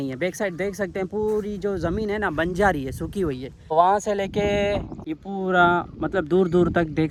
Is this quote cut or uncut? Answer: uncut